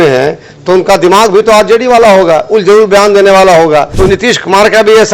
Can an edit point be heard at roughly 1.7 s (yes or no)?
no